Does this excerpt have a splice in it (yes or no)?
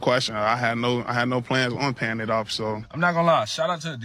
yes